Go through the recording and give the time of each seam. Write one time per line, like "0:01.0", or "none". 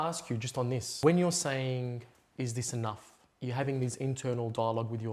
0:00.9